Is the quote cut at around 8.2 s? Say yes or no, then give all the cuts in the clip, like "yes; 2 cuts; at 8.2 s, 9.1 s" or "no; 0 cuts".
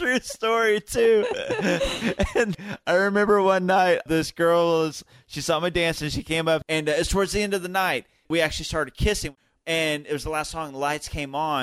yes; 4 cuts; at 2.5 s, 6.7 s, 8.2 s, 9.4 s